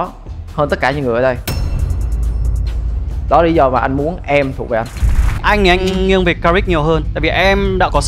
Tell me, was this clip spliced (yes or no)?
yes